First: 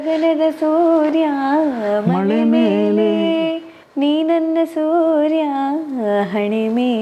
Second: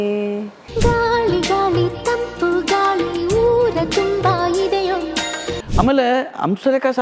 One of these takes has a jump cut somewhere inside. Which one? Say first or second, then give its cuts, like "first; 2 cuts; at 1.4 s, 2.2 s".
second; 1 cut; at 5.5 s